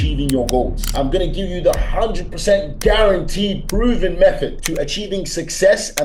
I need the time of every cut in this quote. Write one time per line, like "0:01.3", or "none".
0:04.5

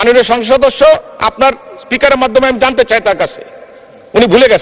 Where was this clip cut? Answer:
none

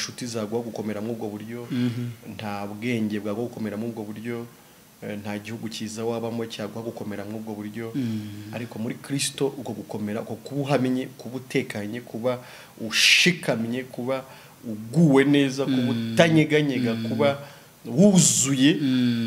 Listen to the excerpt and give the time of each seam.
none

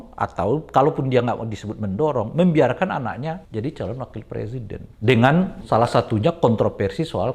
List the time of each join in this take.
0:03.4
0:04.8
0:05.6

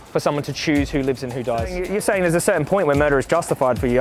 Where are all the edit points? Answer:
0:01.7

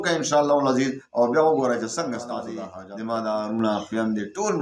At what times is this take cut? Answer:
0:02.6

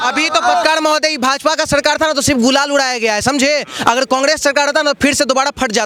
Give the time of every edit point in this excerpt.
none

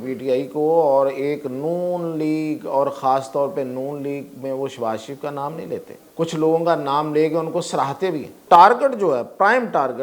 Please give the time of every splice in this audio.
0:06.0
0:08.4

